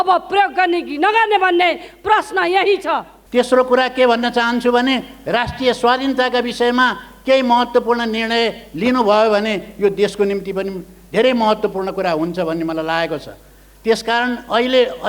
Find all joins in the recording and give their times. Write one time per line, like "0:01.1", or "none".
0:03.1